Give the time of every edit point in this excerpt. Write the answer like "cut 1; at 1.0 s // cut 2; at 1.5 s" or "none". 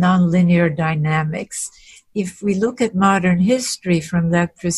cut 1; at 2.0 s